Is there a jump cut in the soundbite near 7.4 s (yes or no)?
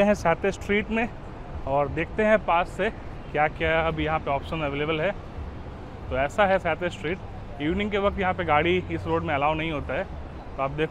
no